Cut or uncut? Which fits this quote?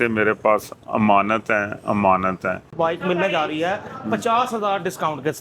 cut